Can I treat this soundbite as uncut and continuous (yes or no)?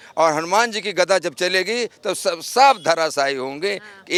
yes